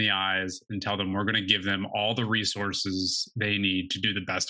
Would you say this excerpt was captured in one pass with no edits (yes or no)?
yes